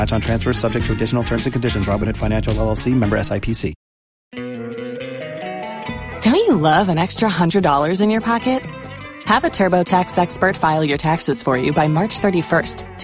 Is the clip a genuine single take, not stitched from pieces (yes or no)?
no